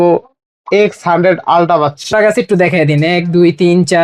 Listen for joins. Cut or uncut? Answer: cut